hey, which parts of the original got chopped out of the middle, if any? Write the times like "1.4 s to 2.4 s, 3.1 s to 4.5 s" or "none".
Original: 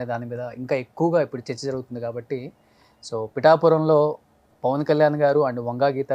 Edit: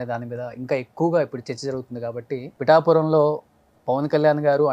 2.6 s to 3.3 s